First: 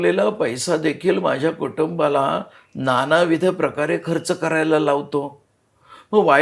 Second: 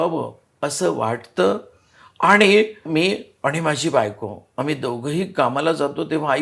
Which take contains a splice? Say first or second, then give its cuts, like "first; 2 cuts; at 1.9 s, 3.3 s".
second; 1 cut; at 2.9 s